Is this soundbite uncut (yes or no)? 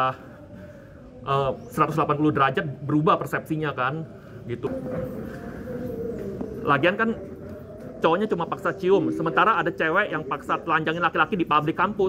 no